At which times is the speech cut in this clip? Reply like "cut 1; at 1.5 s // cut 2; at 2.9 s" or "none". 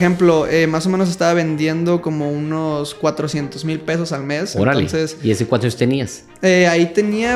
none